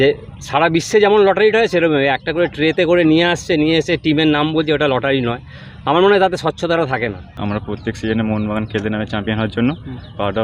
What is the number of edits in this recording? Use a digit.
1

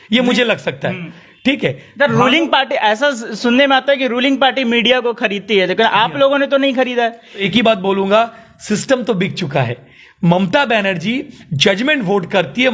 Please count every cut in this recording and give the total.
1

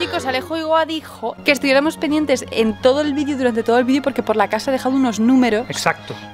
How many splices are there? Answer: 1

